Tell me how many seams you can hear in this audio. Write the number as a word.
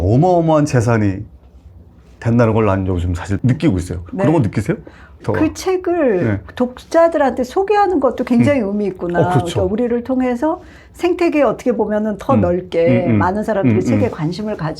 one